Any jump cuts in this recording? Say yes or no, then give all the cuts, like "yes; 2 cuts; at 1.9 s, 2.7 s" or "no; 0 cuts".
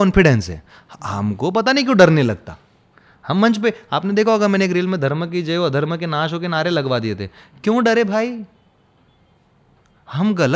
no; 0 cuts